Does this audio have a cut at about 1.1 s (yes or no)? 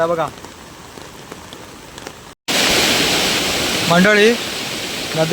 no